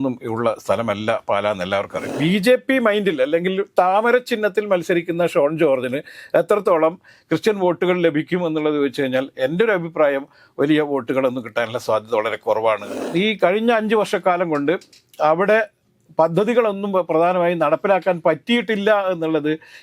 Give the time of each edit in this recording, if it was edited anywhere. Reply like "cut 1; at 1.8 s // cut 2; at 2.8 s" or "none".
cut 1; at 2.1 s // cut 2; at 13.0 s